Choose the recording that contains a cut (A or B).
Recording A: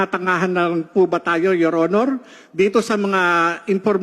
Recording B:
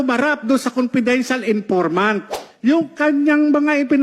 B